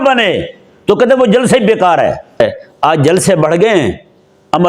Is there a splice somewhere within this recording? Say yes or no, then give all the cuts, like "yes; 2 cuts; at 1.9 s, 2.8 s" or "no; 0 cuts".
yes; 1 cut; at 2.4 s